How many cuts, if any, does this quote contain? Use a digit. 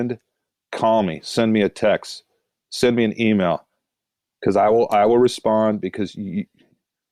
0